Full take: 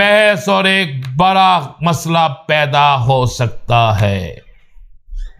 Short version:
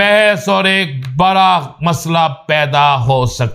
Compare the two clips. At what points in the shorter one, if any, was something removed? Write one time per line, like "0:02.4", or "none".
none